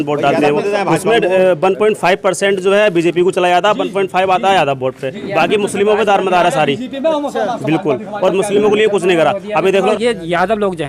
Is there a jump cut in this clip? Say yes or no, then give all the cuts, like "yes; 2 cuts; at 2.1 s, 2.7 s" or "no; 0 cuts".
yes; 1 cut; at 9.9 s